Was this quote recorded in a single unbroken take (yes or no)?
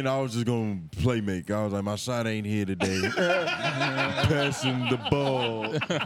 yes